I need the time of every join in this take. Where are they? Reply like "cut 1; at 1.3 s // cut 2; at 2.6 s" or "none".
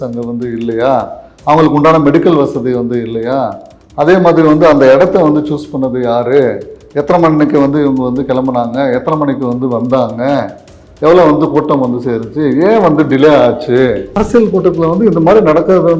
cut 1; at 14.1 s